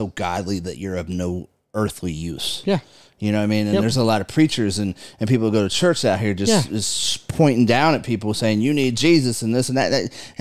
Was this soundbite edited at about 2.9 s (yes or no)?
no